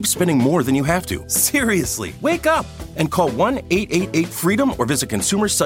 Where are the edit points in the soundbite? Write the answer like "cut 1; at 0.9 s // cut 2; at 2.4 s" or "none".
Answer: cut 1; at 1.7 s